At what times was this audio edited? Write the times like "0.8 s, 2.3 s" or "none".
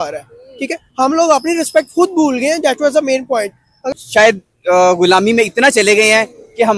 3.9 s